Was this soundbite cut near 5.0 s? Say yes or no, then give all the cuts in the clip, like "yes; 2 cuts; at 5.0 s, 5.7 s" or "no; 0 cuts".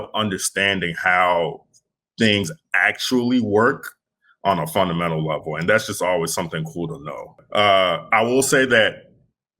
no; 1 cut; at 7.4 s